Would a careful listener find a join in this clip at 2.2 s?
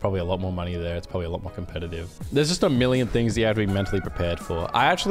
yes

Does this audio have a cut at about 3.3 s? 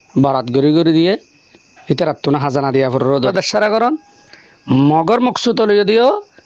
yes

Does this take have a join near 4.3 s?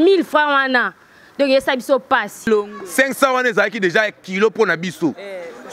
no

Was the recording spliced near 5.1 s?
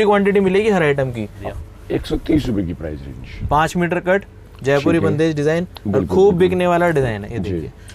no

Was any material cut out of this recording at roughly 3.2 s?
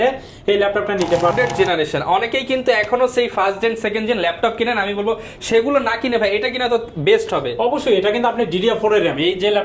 no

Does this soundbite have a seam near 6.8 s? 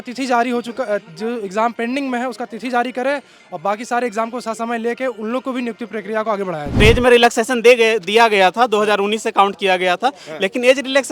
yes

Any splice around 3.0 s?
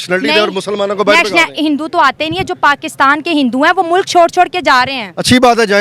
no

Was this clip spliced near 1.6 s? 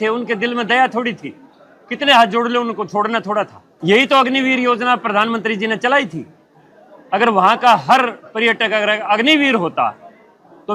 no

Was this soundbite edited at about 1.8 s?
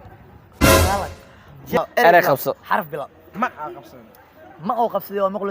yes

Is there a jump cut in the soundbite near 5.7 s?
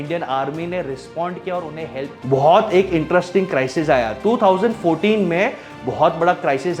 no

